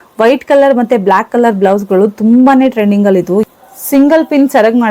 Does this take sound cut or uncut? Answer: cut